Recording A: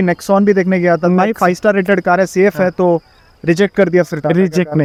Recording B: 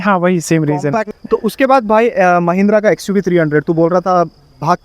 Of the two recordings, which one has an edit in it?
B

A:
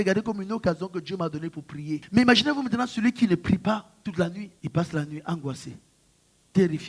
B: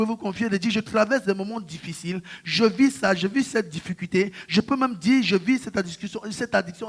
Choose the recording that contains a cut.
A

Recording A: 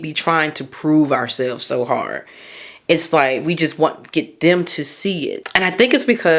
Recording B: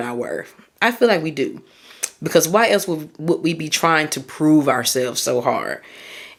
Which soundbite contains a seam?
A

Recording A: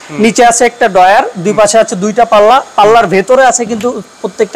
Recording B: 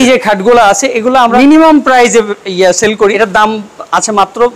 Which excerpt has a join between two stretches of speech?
B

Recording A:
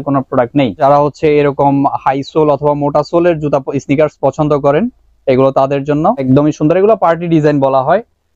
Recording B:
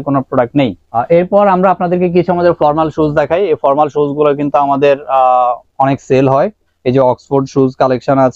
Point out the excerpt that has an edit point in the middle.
A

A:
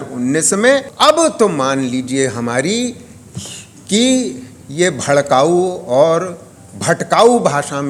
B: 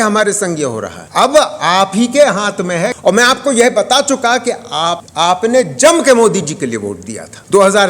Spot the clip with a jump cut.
B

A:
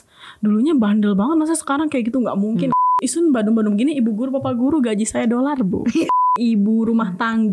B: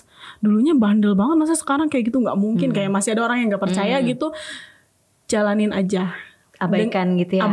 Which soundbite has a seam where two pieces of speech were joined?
A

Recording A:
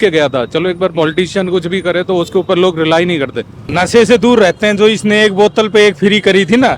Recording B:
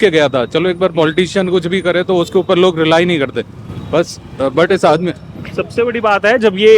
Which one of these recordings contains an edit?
A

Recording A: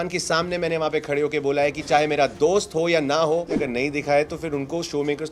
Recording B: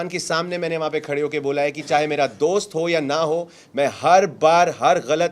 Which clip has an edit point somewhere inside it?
A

